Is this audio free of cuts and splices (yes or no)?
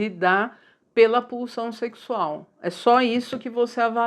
yes